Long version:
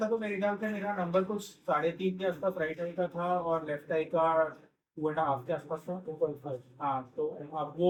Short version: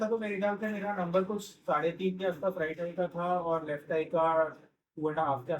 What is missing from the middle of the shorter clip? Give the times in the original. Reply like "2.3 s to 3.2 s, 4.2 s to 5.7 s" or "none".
none